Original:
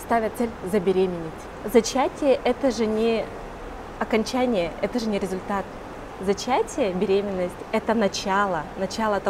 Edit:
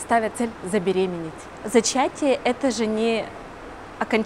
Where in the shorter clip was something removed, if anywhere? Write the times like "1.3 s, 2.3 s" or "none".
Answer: none